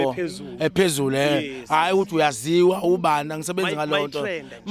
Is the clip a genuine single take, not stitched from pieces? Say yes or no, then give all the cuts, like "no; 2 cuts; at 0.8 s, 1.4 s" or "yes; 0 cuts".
yes; 0 cuts